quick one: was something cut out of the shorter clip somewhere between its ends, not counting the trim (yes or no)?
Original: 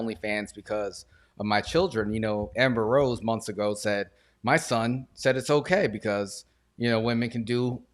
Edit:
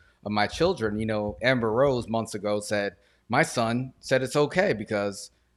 no